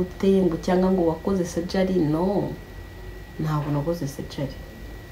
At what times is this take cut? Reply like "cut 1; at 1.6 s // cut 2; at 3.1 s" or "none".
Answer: none